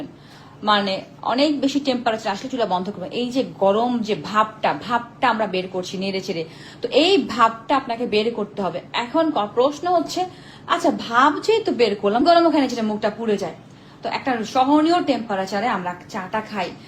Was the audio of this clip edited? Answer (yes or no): yes